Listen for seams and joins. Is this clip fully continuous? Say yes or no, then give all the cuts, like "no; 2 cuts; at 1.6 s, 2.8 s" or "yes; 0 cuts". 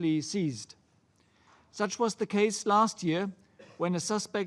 no; 1 cut; at 2.7 s